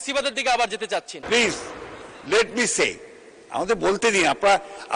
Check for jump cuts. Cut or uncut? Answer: cut